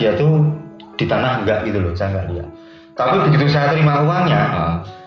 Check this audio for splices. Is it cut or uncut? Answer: uncut